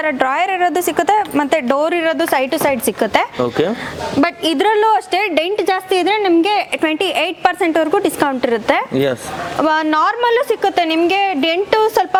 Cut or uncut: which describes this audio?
uncut